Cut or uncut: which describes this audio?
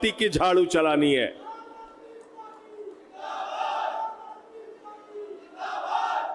uncut